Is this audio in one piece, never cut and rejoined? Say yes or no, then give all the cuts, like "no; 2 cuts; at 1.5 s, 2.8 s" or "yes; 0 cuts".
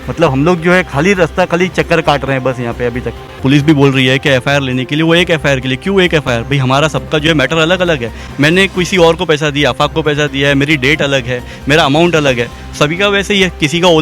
no; 1 cut; at 3.4 s